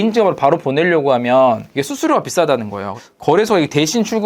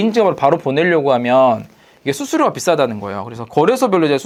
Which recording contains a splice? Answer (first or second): first